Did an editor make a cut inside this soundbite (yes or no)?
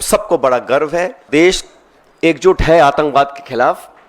yes